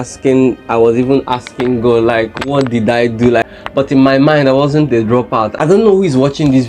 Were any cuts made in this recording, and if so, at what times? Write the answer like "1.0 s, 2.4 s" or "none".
3.4 s, 5.5 s